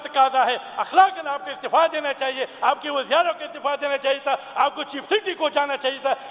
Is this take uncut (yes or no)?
yes